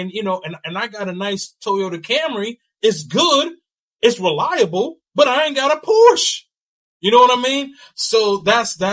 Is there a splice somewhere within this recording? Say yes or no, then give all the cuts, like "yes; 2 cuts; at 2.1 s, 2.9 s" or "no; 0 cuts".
no; 0 cuts